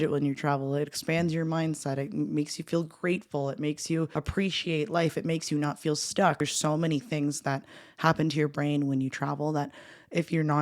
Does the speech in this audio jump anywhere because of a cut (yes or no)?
yes